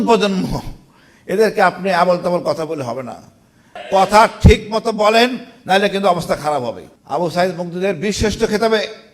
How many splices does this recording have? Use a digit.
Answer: 2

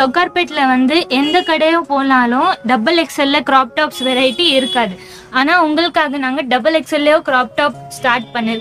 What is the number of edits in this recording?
0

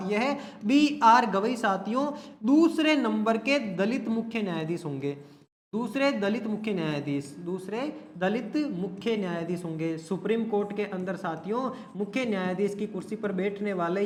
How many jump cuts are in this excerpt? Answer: 0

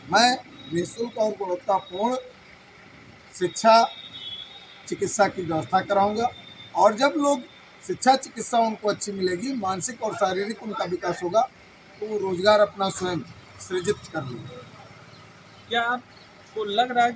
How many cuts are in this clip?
0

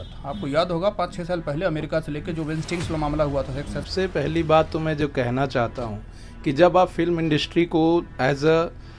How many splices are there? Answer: 1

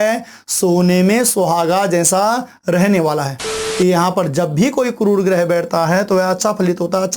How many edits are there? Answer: 1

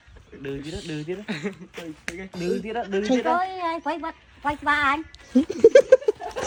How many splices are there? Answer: 0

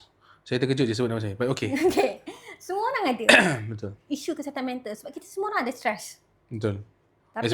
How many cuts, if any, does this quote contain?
0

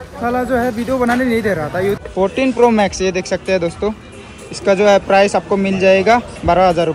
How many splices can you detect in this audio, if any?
1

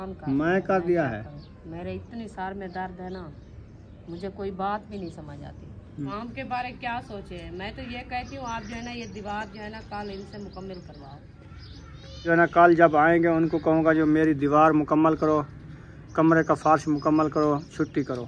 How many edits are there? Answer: 2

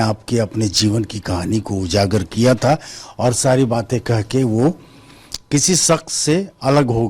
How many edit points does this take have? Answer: 0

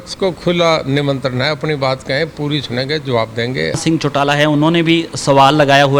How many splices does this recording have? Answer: 1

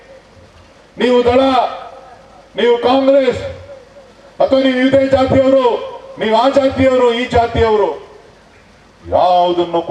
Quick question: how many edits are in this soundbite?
0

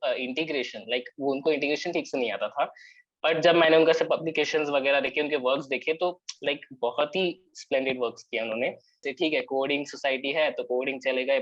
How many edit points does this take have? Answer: 1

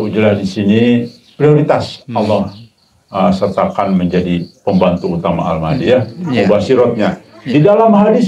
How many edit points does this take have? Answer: 0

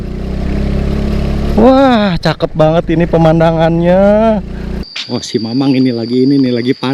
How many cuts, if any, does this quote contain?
1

